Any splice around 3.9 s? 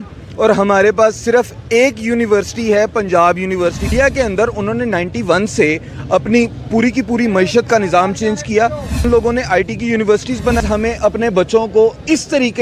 yes; 3 cuts; at 3.9 s, 9.0 s, 10.6 s

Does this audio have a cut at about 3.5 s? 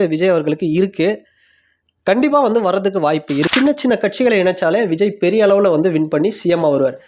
yes; 1 cut; at 3.5 s

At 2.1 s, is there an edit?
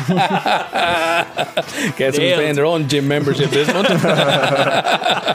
no; 0 cuts

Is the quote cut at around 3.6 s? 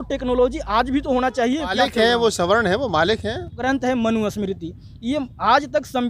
yes; 2 cuts; at 1.7 s, 3.6 s

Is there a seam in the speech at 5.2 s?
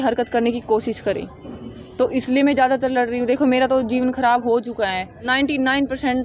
yes; 1 cut; at 5.2 s

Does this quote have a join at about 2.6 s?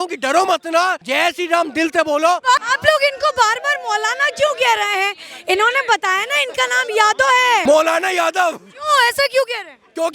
yes; 3 cuts; at 1.0 s, 2.6 s, 7.6 s

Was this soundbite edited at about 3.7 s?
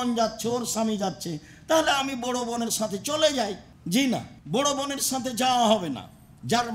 yes; 2 cuts; at 3.7 s, 4.3 s

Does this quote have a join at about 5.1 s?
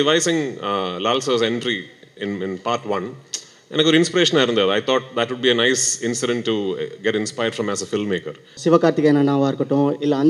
no; 1 cut; at 8.5 s

